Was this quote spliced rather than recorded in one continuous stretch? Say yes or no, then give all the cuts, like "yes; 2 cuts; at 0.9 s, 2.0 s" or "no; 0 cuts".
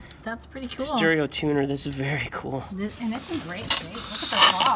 no; 0 cuts